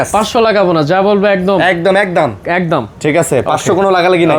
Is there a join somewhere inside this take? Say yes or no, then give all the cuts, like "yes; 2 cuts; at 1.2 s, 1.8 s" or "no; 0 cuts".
no; 0 cuts